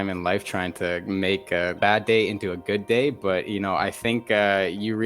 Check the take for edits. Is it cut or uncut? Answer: cut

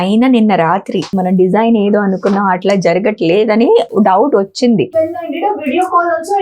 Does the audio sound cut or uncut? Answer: cut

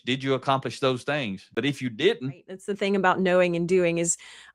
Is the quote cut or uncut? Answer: cut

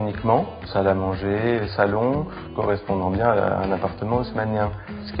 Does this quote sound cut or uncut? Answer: cut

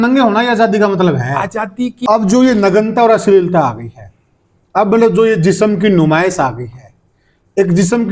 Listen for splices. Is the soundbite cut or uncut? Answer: cut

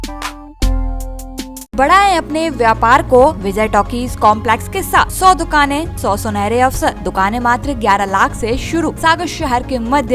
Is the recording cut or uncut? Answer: cut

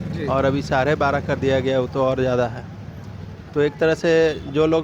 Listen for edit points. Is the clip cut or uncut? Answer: uncut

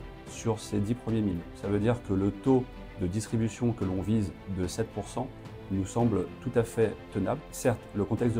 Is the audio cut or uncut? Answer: cut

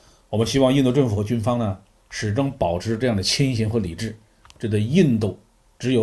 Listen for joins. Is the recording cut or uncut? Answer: uncut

